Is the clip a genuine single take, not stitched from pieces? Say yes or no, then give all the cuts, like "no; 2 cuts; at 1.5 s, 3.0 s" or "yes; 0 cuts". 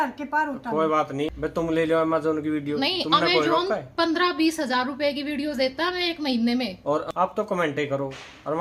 no; 2 cuts; at 1.3 s, 7.1 s